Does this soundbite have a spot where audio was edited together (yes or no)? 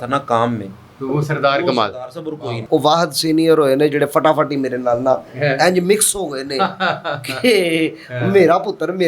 yes